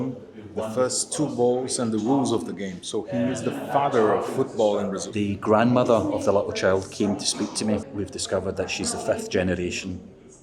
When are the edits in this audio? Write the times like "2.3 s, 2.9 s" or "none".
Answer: 5.0 s, 7.9 s